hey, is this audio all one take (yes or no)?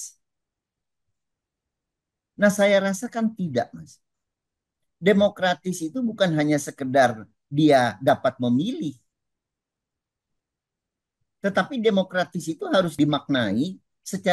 no